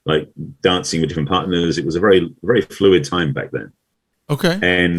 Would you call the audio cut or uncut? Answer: uncut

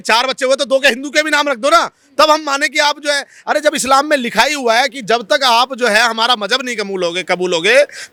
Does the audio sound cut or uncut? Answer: uncut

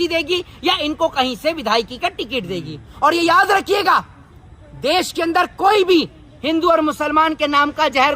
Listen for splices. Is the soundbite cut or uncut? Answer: cut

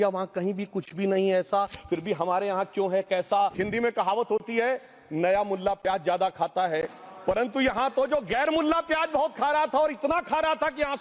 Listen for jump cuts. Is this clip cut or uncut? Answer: cut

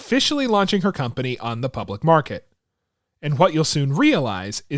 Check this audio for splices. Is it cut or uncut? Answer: uncut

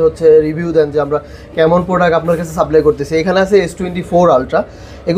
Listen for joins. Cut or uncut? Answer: uncut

